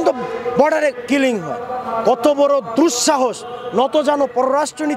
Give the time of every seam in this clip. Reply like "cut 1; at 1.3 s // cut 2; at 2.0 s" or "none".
none

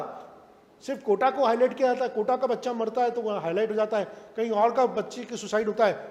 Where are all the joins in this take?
none

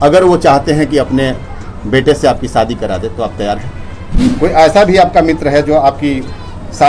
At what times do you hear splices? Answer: cut 1; at 4.3 s

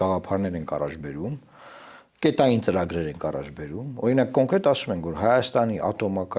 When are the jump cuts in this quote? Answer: none

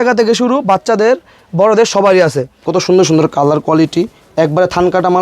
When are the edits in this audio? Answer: cut 1; at 2.6 s

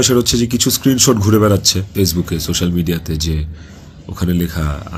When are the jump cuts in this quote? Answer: none

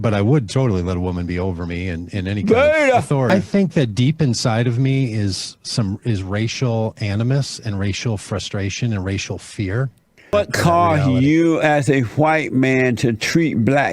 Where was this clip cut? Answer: cut 1; at 3.3 s // cut 2; at 10.3 s

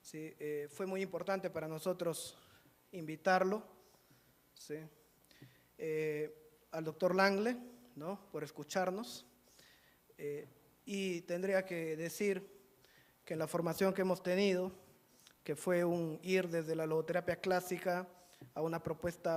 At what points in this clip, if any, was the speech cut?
none

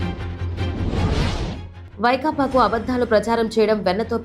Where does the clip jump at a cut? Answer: cut 1; at 1.7 s

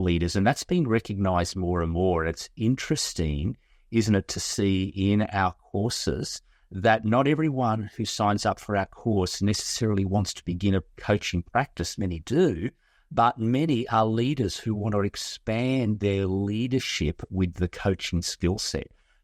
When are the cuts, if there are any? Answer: none

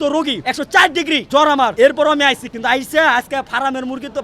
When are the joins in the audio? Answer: cut 1; at 2.4 s

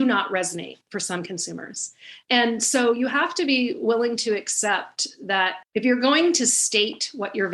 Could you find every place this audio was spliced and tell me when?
cut 1; at 2.1 s // cut 2; at 5.6 s

